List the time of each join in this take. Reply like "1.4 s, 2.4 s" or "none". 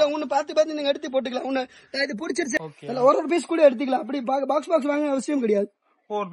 2.6 s